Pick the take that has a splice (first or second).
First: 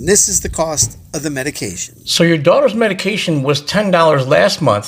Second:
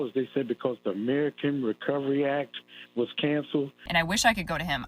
second